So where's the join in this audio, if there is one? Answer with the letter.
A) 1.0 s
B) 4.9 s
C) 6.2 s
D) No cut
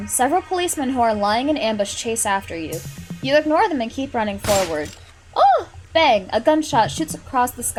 D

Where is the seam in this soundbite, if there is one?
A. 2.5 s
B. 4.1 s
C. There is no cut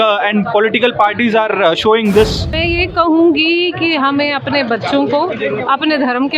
A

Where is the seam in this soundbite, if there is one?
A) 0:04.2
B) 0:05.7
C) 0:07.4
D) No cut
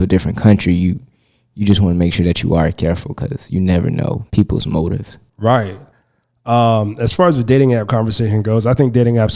A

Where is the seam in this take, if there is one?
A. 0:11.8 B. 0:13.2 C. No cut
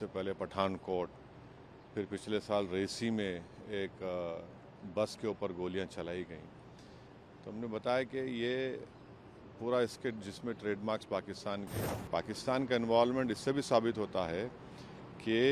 A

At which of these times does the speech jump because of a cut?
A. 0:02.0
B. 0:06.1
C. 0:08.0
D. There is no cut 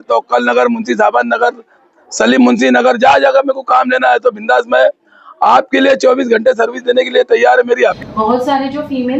C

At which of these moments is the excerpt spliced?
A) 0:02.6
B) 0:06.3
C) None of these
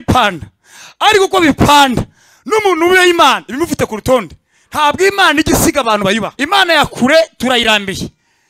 B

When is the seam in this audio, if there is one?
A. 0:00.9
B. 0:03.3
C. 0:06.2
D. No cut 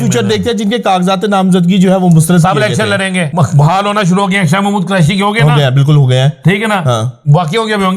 B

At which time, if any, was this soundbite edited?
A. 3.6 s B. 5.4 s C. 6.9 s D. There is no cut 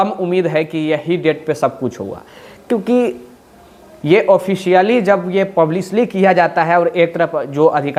D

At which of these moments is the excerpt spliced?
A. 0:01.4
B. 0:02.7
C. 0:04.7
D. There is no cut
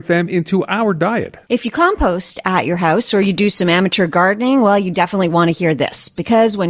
A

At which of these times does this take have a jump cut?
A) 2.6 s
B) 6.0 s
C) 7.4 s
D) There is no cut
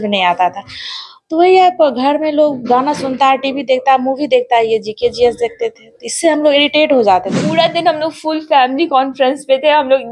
C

